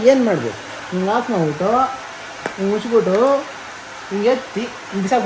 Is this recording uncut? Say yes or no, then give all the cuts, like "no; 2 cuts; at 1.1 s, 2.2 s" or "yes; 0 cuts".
yes; 0 cuts